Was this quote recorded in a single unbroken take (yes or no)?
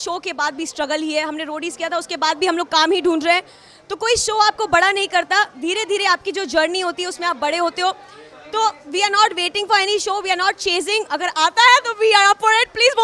yes